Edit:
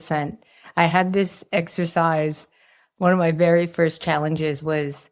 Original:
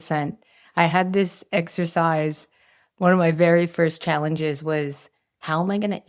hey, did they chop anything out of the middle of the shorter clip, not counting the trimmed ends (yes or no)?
no